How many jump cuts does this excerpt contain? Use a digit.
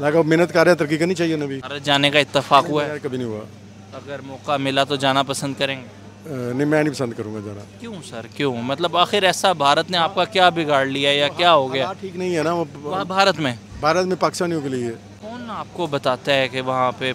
2